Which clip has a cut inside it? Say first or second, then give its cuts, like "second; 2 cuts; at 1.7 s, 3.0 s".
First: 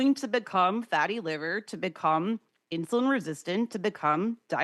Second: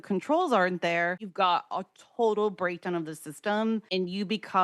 second; 2 cuts; at 1.2 s, 3.9 s